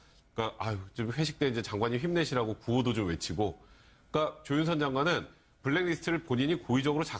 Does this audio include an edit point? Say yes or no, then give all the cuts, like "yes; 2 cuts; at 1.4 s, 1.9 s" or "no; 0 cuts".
yes; 1 cut; at 5.5 s